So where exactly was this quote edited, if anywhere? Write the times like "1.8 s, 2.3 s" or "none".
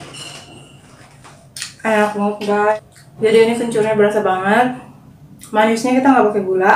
2.8 s